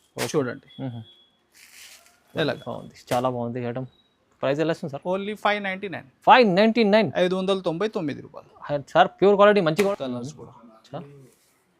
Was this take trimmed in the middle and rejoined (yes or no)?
yes